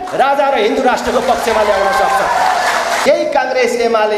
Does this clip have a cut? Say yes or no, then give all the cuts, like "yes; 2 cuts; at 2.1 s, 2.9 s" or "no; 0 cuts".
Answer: yes; 1 cut; at 3.0 s